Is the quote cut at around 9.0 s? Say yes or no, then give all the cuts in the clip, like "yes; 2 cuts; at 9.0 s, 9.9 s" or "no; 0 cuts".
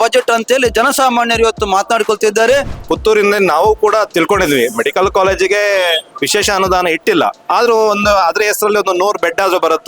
no; 4 cuts; at 2.8 s, 4.1 s, 6.1 s, 7.4 s